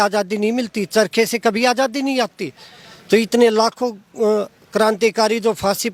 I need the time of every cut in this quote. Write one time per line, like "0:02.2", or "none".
none

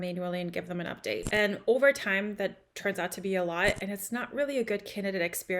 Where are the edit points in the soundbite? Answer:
0:01.2

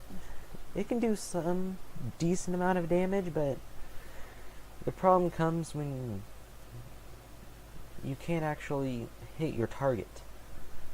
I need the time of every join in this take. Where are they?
0:01.2

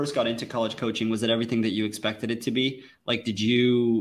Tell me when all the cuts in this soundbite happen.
none

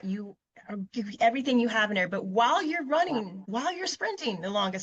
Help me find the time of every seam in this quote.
0:03.4

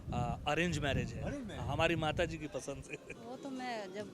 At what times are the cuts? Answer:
0:03.1

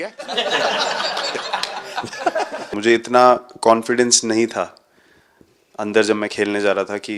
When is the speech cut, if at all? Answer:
0:02.7

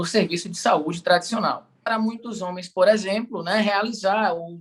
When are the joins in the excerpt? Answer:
0:01.9

